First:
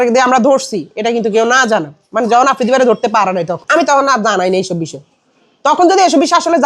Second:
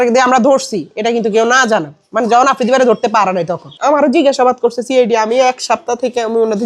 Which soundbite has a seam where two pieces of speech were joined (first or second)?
second